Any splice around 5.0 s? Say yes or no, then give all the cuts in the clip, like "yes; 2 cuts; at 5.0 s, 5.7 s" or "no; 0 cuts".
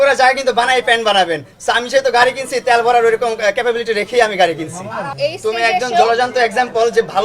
no; 0 cuts